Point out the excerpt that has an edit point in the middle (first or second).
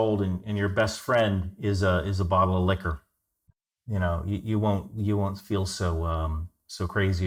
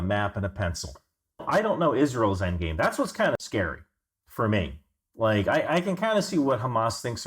second